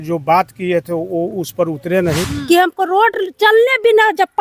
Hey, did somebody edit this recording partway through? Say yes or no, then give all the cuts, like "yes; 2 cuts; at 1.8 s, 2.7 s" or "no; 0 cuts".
yes; 1 cut; at 2.2 s